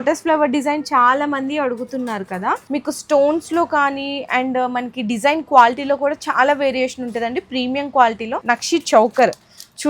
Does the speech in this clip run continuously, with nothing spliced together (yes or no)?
no